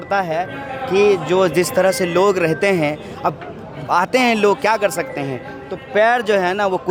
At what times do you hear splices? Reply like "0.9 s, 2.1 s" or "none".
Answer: none